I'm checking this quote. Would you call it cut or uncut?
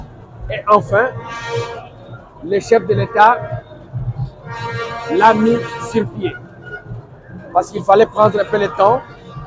uncut